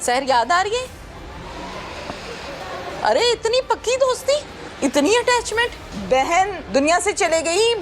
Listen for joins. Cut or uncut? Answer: cut